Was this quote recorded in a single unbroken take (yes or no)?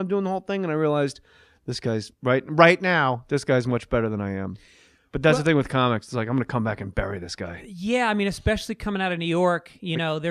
yes